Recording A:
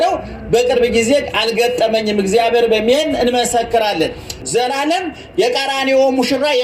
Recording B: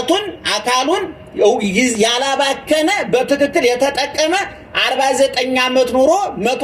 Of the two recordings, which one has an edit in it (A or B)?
A